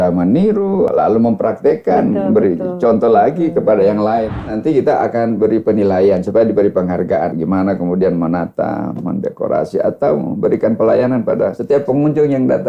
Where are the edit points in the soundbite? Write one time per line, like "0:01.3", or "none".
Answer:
0:00.9
0:04.5
0:07.3
0:11.6